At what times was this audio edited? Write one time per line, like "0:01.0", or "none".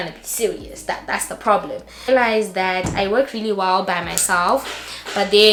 none